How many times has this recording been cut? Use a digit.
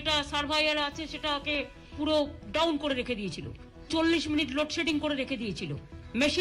2